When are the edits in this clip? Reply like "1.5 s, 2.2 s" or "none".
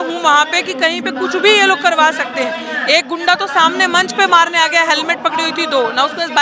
none